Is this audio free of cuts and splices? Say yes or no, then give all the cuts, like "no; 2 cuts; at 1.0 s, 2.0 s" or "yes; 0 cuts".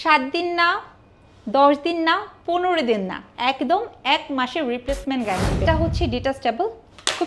no; 1 cut; at 5.6 s